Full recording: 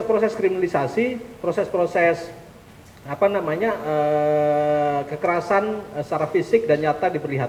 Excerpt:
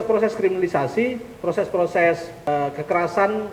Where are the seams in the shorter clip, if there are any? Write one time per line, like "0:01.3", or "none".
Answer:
0:02.5